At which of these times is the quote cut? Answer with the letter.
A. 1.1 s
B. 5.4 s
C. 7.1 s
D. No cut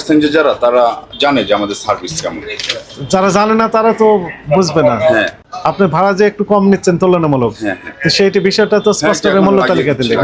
D